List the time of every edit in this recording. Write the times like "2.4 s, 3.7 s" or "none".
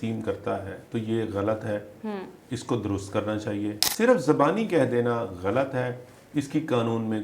3.8 s